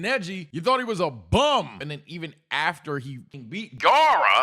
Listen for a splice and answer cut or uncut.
cut